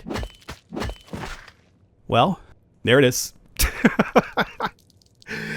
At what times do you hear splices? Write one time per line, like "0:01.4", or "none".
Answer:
0:02.5